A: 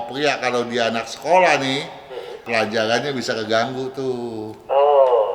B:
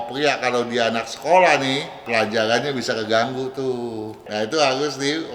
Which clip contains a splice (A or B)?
B